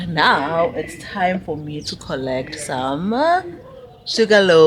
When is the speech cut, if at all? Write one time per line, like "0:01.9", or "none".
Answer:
none